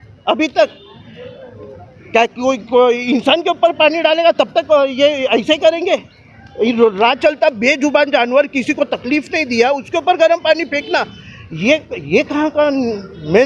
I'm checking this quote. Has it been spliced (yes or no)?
no